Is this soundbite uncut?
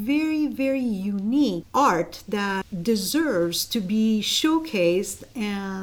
no; 2 cuts; at 1.6 s, 2.7 s

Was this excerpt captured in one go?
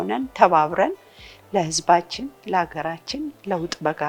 yes; 0 cuts

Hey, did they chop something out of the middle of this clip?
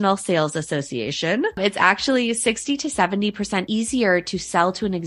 yes; 2 cuts; at 1.5 s, 3.7 s

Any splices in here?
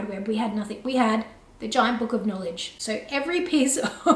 no; 0 cuts

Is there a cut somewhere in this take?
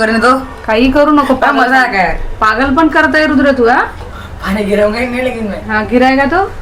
yes; 1 cut; at 4.0 s

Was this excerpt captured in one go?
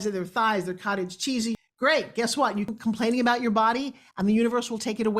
no; 2 cuts; at 1.5 s, 2.7 s

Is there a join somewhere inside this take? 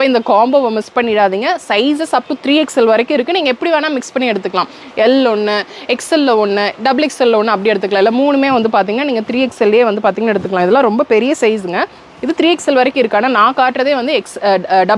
no; 0 cuts

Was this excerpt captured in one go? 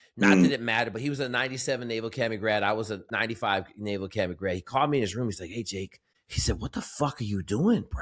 yes; 0 cuts

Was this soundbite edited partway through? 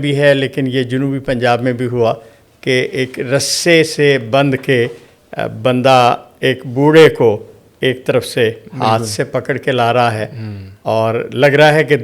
no; 0 cuts

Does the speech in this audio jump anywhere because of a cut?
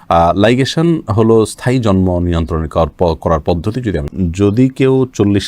yes; 1 cut; at 4.1 s

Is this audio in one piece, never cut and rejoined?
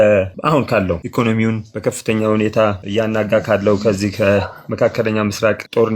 no; 1 cut; at 1.0 s

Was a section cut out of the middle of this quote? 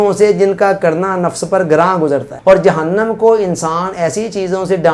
yes; 1 cut; at 2.3 s

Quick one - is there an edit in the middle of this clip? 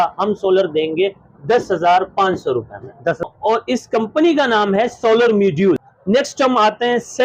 yes; 2 cuts; at 3.2 s, 5.9 s

